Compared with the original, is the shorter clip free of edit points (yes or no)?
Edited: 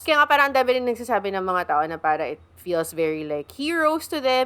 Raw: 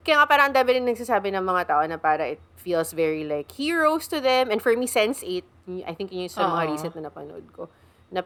yes